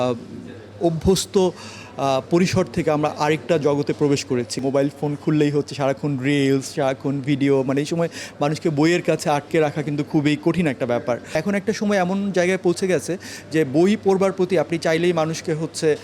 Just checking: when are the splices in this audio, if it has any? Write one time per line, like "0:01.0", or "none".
0:04.6
0:11.3